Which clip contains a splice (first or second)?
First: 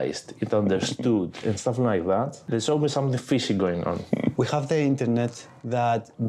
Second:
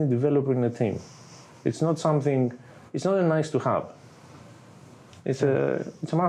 first